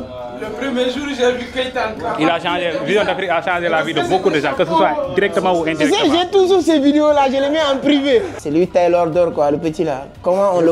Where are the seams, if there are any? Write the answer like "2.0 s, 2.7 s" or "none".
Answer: 8.3 s